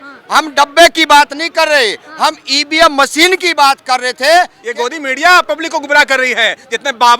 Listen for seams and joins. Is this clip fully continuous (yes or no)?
no